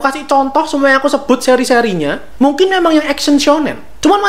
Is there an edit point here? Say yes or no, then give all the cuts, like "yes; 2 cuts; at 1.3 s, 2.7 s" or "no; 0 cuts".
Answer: no; 0 cuts